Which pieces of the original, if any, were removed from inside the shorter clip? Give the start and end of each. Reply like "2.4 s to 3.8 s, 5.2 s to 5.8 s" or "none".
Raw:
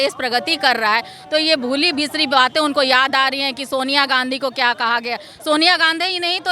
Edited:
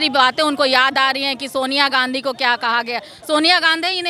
none